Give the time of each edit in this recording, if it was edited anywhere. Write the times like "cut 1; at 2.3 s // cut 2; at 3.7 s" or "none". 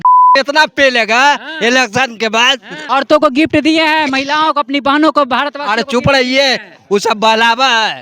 cut 1; at 2.8 s